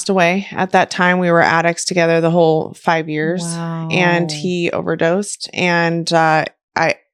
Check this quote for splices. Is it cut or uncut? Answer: uncut